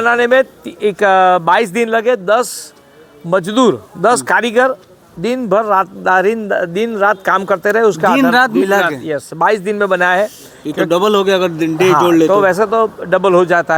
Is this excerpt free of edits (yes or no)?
yes